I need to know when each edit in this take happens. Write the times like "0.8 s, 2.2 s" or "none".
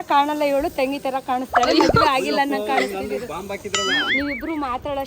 4.1 s